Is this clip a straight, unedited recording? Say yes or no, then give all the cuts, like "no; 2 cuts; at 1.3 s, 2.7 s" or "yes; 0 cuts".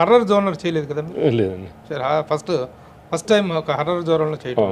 yes; 0 cuts